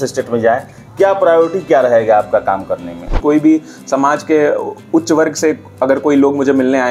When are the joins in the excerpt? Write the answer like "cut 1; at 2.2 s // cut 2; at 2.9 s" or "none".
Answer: cut 1; at 3.1 s

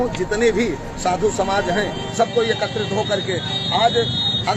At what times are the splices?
none

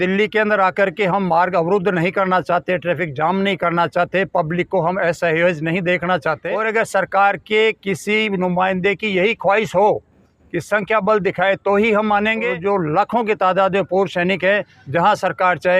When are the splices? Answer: cut 1; at 6.5 s // cut 2; at 12.6 s

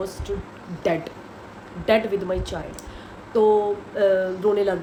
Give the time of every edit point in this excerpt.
none

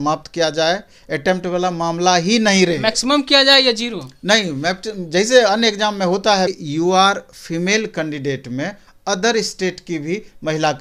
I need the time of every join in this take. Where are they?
cut 1; at 6.5 s

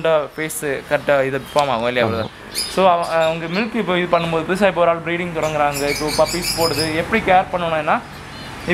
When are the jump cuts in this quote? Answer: none

